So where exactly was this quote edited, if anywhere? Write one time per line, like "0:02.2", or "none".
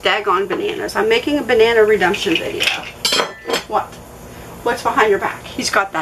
none